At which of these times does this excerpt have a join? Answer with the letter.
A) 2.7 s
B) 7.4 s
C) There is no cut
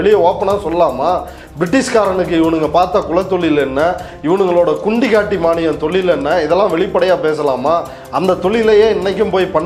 C